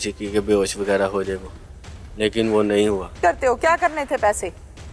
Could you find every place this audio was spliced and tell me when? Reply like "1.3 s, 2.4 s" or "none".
3.2 s